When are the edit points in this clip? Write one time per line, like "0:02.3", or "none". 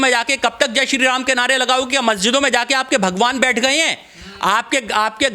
none

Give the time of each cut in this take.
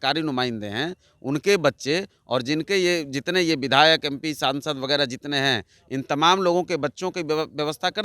none

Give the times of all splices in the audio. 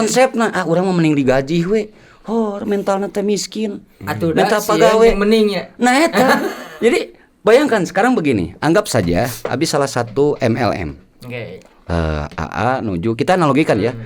none

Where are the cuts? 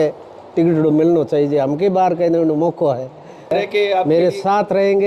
0:03.5

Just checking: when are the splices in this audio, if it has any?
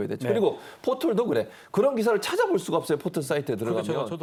none

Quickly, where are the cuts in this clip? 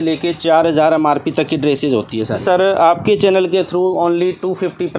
0:02.4

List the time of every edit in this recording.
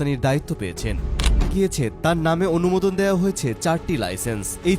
0:01.5

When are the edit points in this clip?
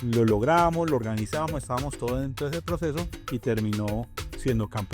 0:03.2

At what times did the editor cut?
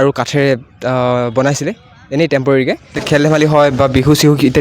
0:03.0

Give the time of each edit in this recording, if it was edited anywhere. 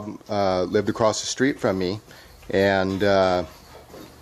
0:02.5

